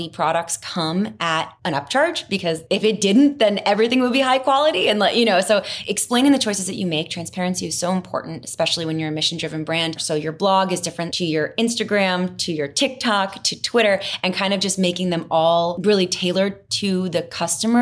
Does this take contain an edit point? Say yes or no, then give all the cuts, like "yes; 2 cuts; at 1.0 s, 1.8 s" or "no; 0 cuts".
yes; 6 cuts; at 1.5 s, 2.6 s, 5.8 s, 10.0 s, 11.0 s, 15.8 s